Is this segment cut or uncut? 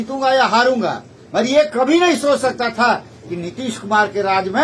uncut